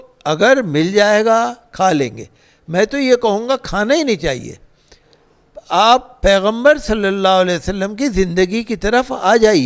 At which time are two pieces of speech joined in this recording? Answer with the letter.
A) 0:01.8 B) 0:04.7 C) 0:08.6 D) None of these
D